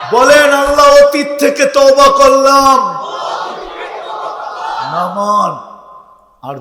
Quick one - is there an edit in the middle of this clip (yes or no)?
no